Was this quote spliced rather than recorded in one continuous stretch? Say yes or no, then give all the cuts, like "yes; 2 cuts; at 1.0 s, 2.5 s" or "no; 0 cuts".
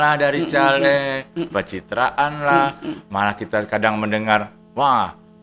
no; 0 cuts